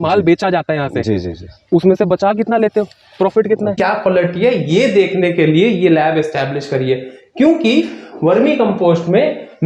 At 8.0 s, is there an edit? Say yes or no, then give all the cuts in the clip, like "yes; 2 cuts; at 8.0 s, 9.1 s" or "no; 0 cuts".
no; 1 cut; at 3.8 s